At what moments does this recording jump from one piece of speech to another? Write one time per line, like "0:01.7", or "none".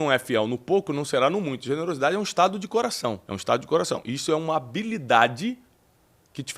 0:03.3